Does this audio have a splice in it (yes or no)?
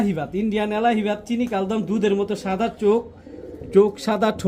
no